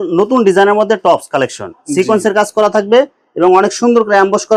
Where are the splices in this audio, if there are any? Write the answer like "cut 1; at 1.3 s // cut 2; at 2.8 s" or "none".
none